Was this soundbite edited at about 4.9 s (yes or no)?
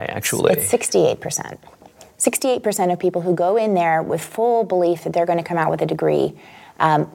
no